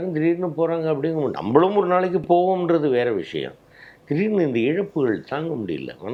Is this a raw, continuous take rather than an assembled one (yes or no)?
yes